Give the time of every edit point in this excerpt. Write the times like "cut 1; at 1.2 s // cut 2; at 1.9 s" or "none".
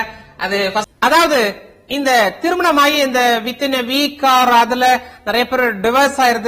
cut 1; at 0.9 s